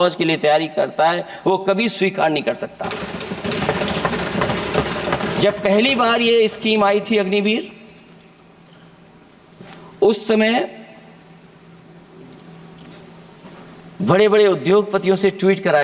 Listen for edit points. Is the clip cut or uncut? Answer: uncut